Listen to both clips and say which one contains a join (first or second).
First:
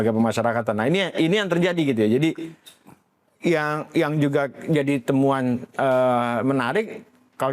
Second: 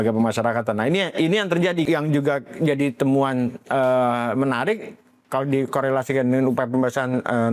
second